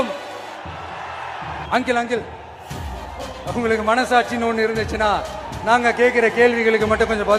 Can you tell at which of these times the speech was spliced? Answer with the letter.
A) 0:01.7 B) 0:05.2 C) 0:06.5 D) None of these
A